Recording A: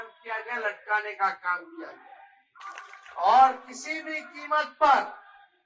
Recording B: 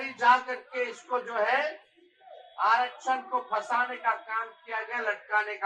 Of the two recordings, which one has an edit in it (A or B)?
A